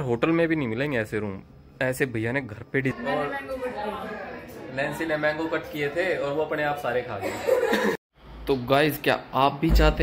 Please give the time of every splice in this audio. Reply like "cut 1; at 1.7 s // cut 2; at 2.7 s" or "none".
cut 1; at 2.9 s // cut 2; at 7.9 s